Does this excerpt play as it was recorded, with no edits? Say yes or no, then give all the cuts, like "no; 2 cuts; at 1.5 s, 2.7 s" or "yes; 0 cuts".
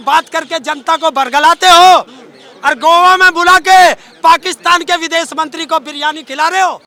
yes; 0 cuts